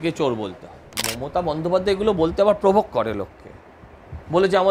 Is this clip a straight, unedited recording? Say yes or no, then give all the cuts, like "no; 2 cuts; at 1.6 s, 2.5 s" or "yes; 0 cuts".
no; 1 cut; at 1.0 s